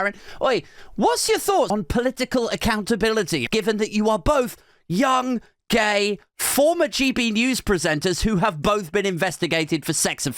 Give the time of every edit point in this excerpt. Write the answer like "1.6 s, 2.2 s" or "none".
1.7 s, 3.4 s